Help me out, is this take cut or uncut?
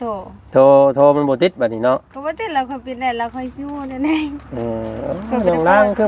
uncut